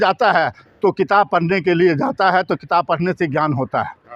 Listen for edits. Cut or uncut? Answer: uncut